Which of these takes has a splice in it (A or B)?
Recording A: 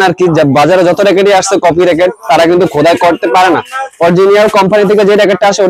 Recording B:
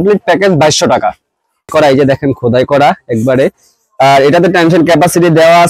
B